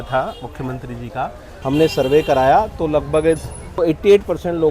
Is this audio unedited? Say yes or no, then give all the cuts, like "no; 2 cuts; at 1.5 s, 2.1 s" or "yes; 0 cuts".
no; 2 cuts; at 1.5 s, 3.8 s